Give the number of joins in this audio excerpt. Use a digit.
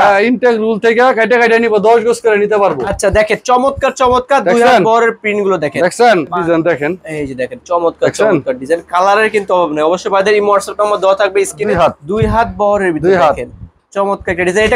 3